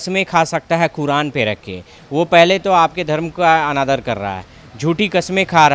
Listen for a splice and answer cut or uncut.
uncut